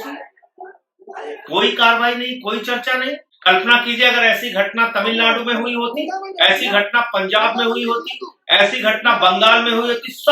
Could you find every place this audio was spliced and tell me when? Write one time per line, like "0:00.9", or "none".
0:03.3